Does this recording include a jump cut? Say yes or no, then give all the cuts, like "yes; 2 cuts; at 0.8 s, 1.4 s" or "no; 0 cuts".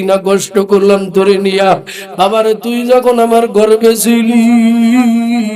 no; 0 cuts